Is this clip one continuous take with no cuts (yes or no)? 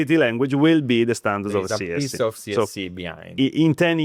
yes